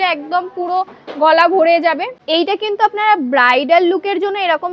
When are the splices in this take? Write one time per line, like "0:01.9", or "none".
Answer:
0:02.1